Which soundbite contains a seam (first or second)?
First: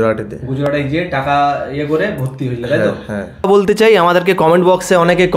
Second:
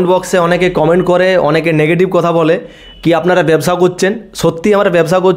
first